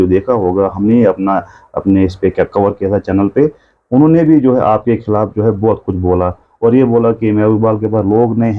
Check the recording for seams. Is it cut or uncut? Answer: uncut